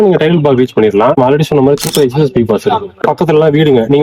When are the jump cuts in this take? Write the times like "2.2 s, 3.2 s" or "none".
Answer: 1.2 s, 3.0 s